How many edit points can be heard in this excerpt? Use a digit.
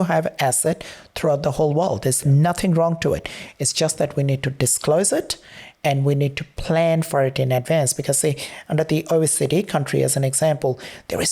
0